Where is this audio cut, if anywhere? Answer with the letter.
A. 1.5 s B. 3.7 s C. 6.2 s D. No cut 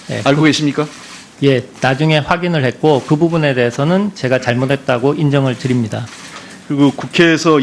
B